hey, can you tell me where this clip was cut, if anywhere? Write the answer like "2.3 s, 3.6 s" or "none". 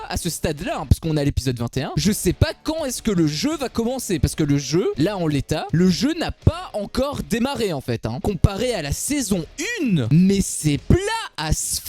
2.0 s, 8.2 s

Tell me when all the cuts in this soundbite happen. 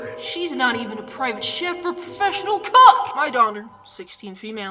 3.1 s

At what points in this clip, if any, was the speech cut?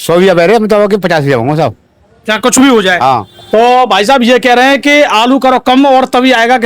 3.3 s

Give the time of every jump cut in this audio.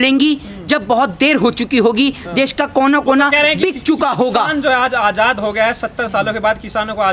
none

